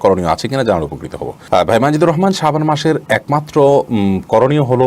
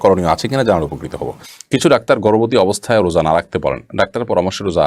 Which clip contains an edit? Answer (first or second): second